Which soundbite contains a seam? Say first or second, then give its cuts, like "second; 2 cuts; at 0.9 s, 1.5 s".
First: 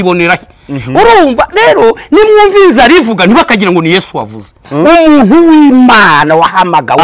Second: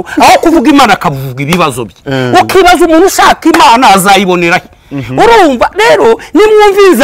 first; 1 cut; at 4.6 s